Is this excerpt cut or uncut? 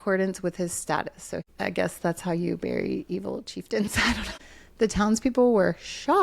cut